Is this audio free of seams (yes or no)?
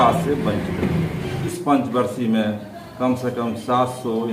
no